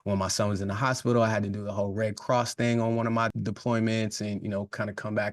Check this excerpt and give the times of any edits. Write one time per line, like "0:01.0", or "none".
none